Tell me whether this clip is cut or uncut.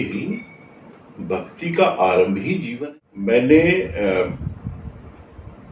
cut